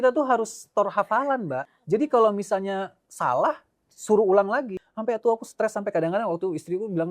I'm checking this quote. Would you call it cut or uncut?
cut